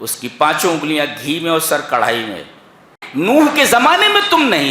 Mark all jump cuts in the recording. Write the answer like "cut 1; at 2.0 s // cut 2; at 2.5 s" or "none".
cut 1; at 3.0 s